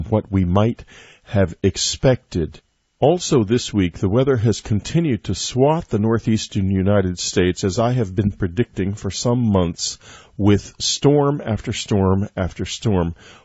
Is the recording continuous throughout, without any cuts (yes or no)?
yes